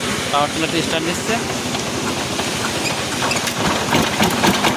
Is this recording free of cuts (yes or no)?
yes